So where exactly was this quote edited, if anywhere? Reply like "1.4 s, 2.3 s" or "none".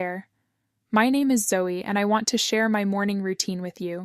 1.8 s